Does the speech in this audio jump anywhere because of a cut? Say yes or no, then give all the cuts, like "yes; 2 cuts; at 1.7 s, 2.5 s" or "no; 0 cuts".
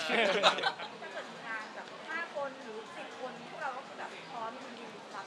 yes; 1 cut; at 0.9 s